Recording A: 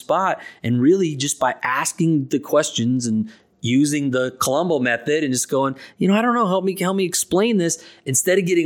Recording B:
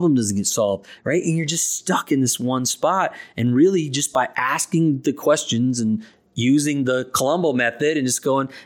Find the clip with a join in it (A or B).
B